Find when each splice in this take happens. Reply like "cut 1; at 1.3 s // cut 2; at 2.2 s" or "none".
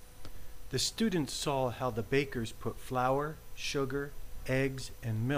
none

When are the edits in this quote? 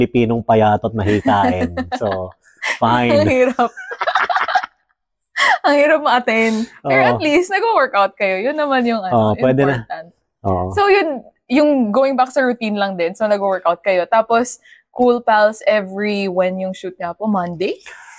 none

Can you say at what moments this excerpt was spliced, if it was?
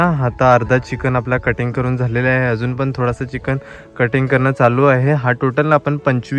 none

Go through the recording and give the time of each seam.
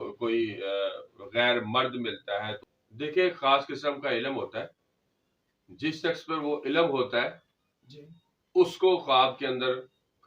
cut 1; at 2.6 s

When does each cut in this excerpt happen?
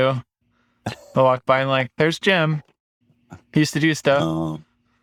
none

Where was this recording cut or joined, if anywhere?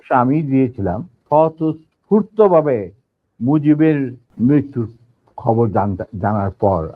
cut 1; at 1.1 s // cut 2; at 4.2 s

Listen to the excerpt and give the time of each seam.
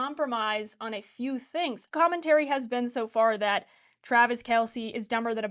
cut 1; at 1.9 s

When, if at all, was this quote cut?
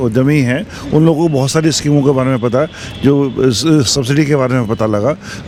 none

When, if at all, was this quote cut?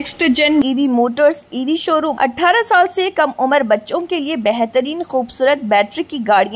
cut 1; at 2.1 s

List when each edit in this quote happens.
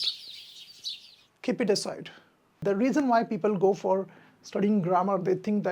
cut 1; at 2.6 s

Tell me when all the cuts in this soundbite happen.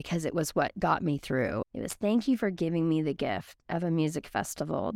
cut 1; at 1.7 s

